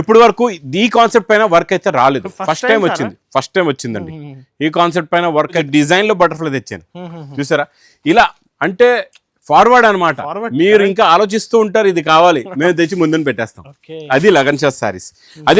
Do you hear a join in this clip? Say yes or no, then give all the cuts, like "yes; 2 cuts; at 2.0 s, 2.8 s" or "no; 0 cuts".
yes; 1 cut; at 5.7 s